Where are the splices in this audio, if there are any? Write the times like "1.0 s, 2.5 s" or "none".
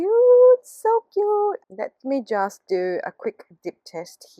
1.6 s